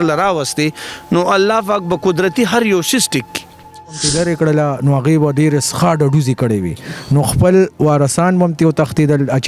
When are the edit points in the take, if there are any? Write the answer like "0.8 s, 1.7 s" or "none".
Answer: 4.0 s